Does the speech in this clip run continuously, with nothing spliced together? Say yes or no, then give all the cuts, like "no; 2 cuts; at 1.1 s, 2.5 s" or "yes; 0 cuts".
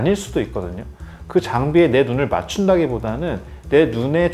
no; 1 cut; at 1.2 s